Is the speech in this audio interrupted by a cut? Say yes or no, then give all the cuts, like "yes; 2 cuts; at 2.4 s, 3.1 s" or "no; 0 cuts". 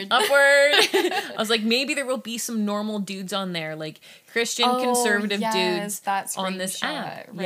no; 0 cuts